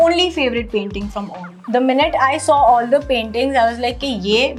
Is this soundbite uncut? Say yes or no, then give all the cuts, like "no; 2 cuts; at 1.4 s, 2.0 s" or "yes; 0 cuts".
yes; 0 cuts